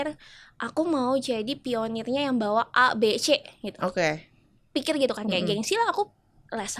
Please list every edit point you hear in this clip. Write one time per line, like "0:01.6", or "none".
none